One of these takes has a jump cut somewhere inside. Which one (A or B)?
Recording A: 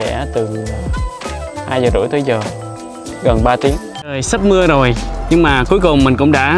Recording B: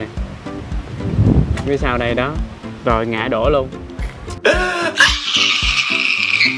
A